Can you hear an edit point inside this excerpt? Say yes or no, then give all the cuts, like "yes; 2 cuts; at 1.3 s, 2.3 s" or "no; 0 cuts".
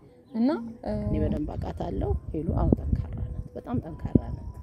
yes; 1 cut; at 1.2 s